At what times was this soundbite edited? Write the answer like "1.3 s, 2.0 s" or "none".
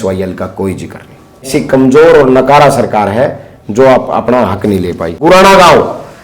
1.5 s, 5.0 s